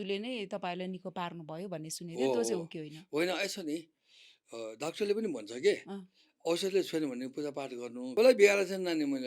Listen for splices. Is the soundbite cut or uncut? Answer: cut